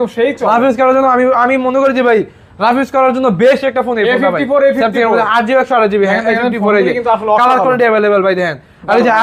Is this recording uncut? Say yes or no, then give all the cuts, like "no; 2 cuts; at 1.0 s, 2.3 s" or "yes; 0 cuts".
yes; 0 cuts